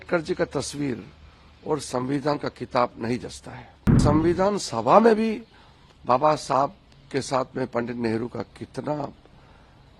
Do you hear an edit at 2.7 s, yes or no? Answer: no